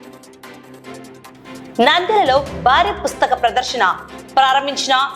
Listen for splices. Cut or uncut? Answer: cut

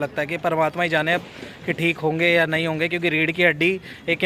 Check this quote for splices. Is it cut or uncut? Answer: uncut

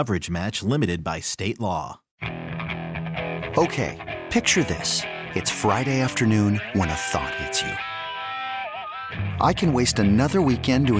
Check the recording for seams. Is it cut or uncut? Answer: cut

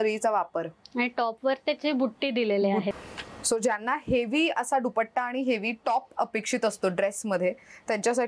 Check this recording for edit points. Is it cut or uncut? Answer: cut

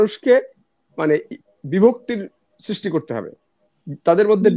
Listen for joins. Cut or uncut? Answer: uncut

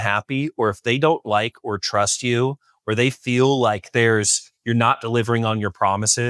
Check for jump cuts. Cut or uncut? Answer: uncut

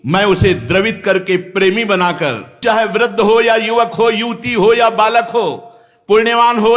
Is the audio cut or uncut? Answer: cut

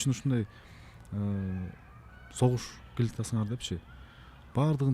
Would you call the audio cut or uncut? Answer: uncut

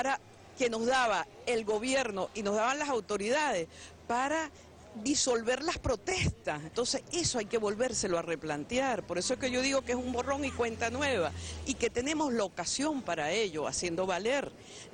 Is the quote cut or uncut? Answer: uncut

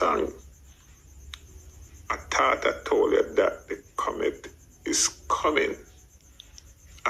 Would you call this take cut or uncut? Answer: uncut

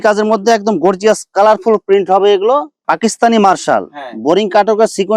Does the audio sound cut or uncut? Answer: cut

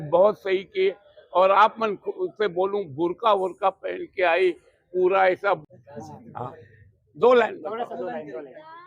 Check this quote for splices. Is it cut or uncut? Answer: cut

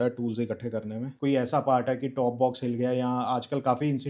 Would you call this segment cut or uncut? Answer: cut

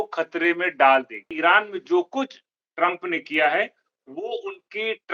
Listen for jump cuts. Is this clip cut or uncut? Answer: cut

